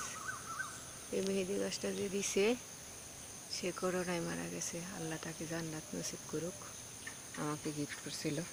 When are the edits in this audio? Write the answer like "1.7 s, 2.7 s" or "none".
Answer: none